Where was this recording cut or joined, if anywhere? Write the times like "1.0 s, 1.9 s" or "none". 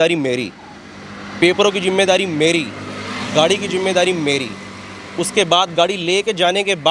none